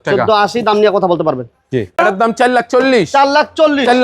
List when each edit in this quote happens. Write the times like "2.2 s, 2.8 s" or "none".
2.0 s